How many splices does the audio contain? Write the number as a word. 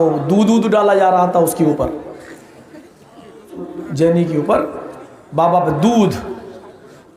one